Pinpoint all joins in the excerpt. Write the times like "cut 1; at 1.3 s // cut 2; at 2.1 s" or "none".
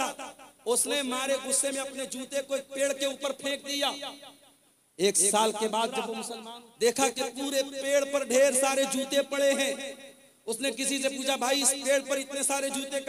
cut 1; at 6.2 s